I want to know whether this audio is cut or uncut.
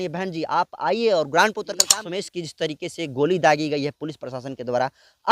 cut